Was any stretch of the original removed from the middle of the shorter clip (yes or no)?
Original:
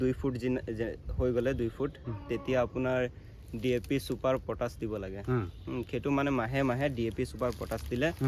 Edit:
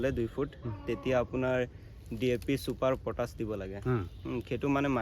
no